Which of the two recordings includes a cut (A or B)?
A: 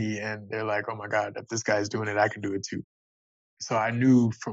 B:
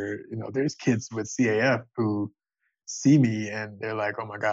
A